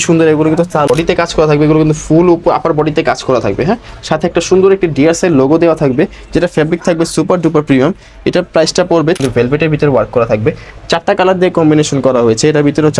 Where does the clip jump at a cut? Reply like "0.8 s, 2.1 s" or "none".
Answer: 0.9 s, 9.2 s